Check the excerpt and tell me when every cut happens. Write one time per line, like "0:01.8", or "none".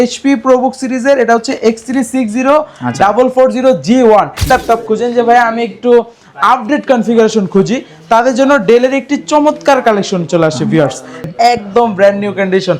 0:04.4
0:11.2